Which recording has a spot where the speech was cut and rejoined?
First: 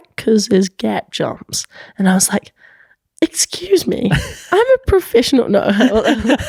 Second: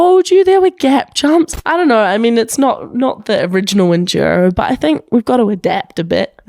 second; 1 cut; at 1.6 s

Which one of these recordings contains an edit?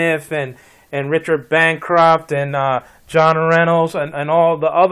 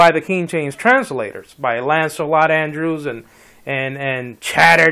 second; 1 cut; at 3.4 s

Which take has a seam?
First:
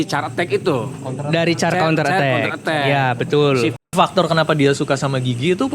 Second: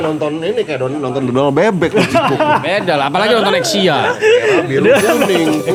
first; 1 cut; at 3.9 s

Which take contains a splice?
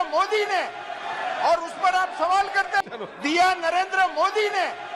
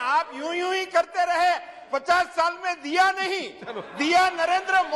first; 1 cut; at 2.8 s

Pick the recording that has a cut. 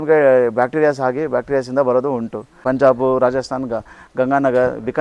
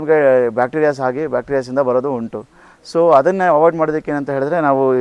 first; 1 cut; at 2.5 s

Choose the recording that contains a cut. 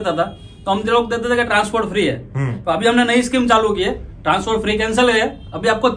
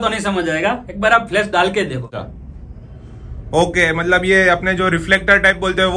second; 1 cut; at 2.2 s

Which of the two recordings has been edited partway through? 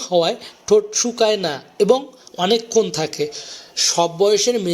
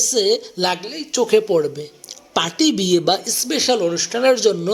first; 1 cut; at 2.9 s

